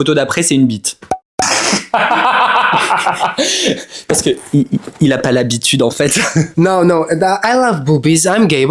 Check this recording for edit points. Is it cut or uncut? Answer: cut